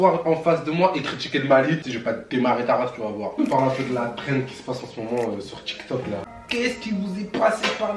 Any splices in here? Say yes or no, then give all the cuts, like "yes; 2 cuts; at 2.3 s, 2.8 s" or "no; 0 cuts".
yes; 3 cuts; at 1.9 s, 3.4 s, 6.3 s